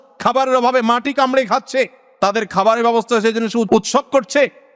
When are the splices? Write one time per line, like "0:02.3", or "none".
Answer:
0:03.7

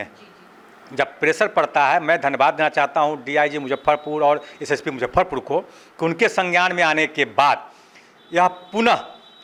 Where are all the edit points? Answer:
none

